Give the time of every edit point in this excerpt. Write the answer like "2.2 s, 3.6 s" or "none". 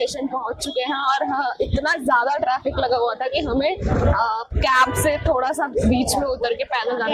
none